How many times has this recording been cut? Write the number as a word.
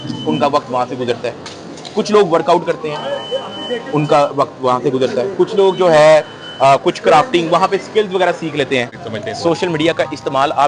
one